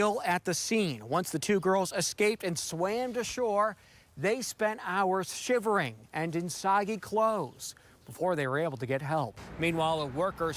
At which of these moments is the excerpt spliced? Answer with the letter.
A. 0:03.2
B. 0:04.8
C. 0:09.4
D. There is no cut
C